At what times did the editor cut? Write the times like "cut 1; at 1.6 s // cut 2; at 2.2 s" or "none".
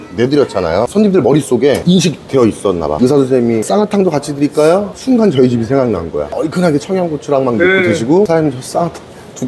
cut 1; at 0.9 s // cut 2; at 3.0 s // cut 3; at 6.3 s